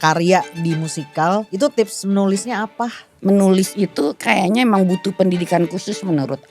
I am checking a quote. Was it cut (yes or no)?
yes